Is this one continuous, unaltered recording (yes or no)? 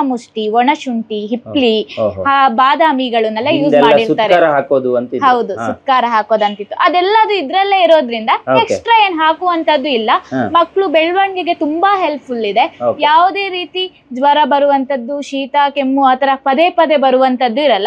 yes